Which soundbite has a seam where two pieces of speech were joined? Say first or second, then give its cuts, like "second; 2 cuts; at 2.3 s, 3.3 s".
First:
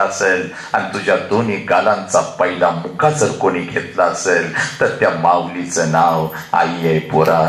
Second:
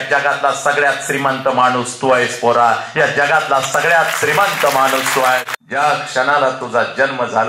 second; 1 cut; at 5.5 s